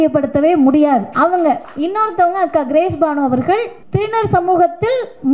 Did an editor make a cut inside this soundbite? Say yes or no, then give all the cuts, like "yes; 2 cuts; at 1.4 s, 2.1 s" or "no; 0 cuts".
yes; 3 cuts; at 1.1 s, 1.7 s, 3.8 s